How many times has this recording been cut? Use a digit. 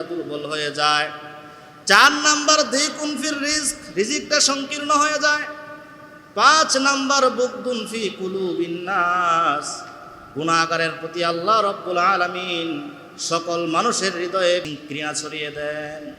1